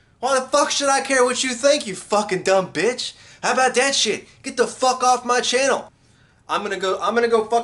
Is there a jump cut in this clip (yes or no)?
no